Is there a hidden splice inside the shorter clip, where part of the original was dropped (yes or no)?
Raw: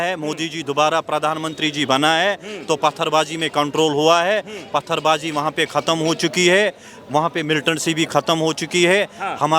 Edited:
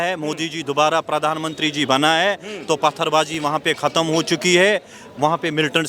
yes